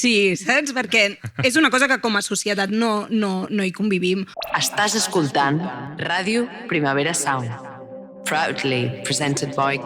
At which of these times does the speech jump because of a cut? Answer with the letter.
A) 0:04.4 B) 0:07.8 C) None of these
A